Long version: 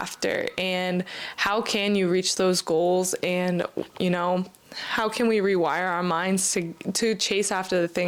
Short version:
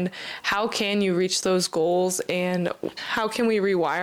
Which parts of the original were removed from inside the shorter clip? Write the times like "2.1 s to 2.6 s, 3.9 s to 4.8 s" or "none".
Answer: 3.8 s to 4.7 s